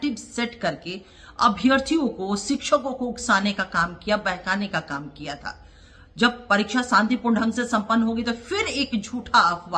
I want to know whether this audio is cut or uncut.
uncut